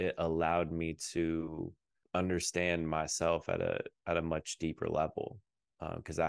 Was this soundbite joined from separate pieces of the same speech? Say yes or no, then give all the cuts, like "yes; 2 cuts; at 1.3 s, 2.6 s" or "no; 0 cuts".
no; 0 cuts